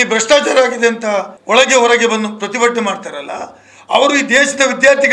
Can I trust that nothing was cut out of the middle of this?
no; 1 cut; at 1.3 s

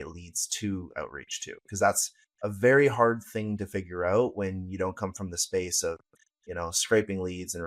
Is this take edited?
no; 0 cuts

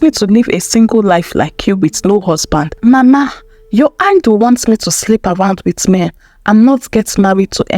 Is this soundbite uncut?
no; 1 cut; at 2.7 s

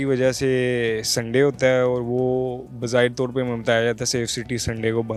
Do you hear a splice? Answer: no; 0 cuts

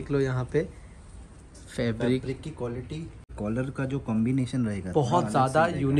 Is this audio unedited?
no; 1 cut; at 3.3 s

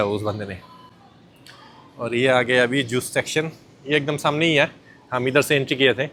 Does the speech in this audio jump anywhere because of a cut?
no; 0 cuts

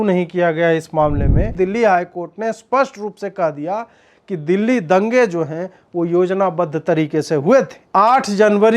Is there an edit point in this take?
yes; 2 cuts; at 1.5 s, 7.8 s

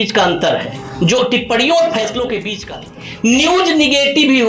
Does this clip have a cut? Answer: yes; 1 cut; at 2.5 s

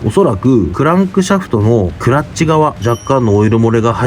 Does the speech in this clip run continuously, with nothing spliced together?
no; 1 cut; at 2.8 s

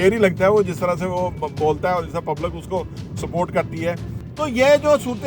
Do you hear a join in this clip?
yes; 1 cut; at 4.2 s

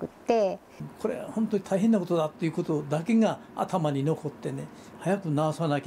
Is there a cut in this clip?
yes; 2 cuts; at 0.9 s, 4.9 s

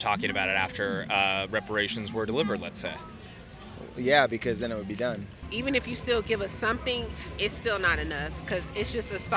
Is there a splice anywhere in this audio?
yes; 1 cut; at 5.3 s

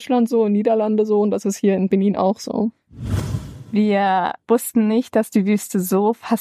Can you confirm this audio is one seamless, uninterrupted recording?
no; 3 cuts; at 1.9 s, 3.1 s, 4.4 s

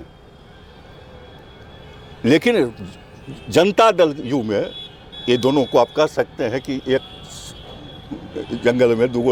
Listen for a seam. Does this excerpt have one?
no; 0 cuts

